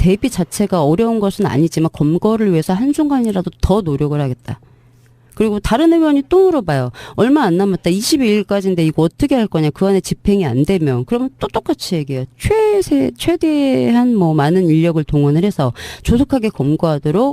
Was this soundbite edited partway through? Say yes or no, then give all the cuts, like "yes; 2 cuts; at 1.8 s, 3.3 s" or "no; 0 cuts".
yes; 1 cut; at 9.6 s